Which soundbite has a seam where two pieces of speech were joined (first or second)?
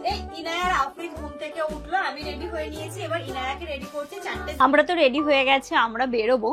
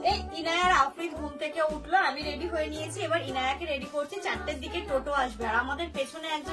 first